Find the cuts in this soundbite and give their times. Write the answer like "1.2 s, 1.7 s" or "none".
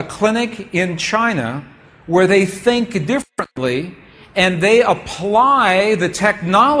none